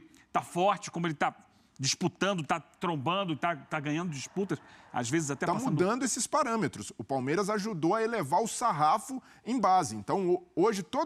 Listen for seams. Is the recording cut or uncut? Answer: cut